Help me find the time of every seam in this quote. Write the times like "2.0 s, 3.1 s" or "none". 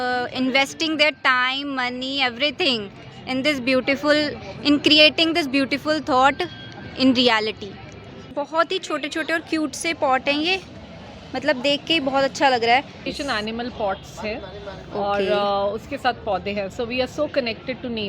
8.3 s, 13.1 s